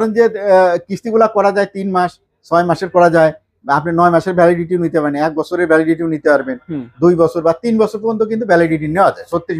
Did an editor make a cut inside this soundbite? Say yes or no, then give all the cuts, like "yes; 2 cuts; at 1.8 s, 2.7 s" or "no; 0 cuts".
no; 0 cuts